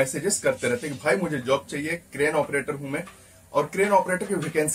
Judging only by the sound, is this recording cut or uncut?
uncut